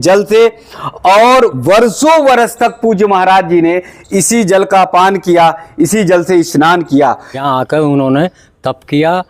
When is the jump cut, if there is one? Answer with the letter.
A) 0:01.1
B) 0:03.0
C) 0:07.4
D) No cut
C